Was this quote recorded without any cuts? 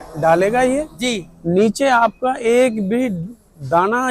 yes; 0 cuts

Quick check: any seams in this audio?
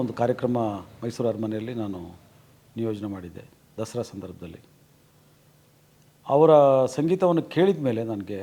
no; 0 cuts

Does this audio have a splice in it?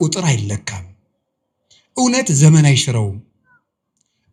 no; 0 cuts

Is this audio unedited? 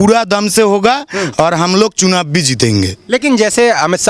yes; 0 cuts

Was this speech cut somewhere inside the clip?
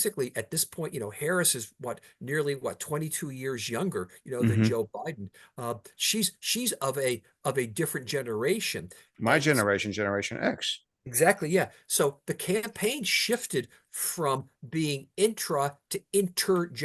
no; 0 cuts

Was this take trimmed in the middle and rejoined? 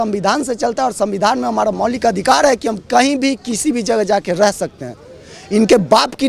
no; 0 cuts

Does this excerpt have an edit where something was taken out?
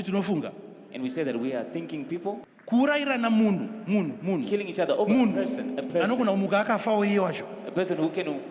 yes; 1 cut; at 2.5 s

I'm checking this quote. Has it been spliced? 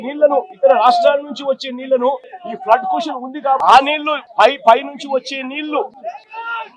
yes; 1 cut; at 3.6 s

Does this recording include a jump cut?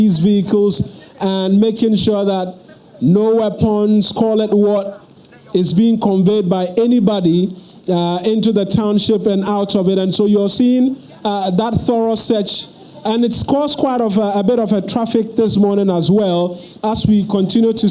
no; 0 cuts

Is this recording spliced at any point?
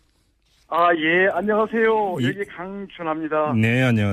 no; 0 cuts

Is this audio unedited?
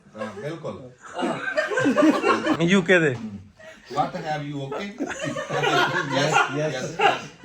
no; 1 cut; at 2.5 s

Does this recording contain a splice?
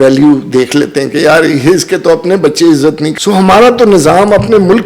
yes; 1 cut; at 3.1 s

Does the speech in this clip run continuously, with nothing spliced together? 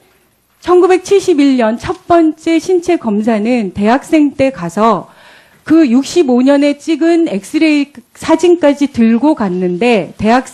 yes; 0 cuts

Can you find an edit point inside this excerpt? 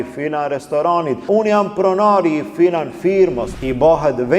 yes; 2 cuts; at 1.2 s, 3.5 s

